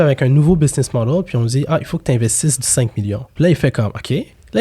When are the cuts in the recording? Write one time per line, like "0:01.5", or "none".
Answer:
0:03.3